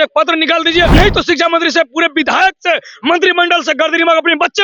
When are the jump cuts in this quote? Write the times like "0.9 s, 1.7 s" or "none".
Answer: 0.9 s